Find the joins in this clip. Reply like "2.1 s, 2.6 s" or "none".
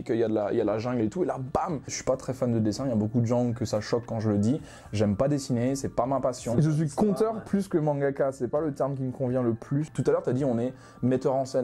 1.9 s, 6.5 s, 9.9 s